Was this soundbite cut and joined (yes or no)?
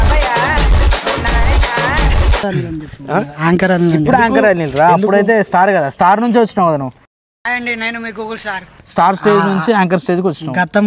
yes